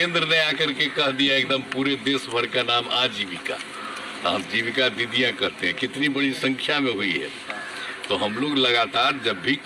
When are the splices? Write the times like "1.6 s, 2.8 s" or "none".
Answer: none